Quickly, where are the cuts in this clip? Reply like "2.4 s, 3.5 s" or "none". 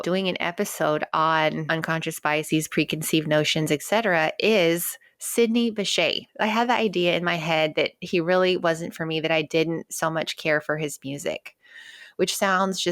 none